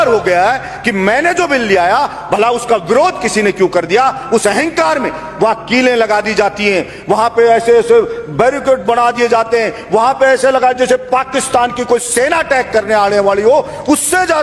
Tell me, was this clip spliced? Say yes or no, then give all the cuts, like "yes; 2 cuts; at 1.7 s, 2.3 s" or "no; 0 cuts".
no; 0 cuts